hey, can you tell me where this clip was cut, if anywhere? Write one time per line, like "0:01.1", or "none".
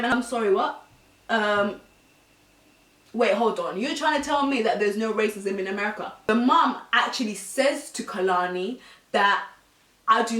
0:06.1